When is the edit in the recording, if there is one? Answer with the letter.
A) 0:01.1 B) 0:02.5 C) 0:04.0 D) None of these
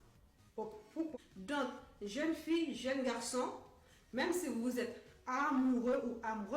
A